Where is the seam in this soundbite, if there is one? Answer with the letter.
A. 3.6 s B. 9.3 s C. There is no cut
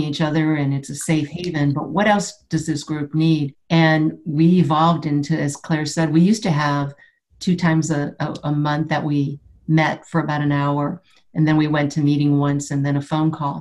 A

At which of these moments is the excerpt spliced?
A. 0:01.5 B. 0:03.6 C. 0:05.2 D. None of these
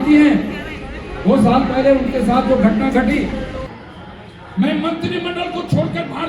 B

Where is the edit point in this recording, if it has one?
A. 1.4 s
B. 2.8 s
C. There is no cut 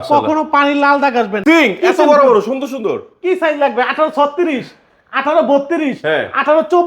A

